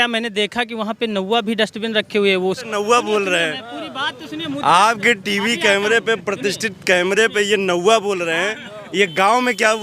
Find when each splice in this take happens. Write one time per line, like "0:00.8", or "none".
0:02.7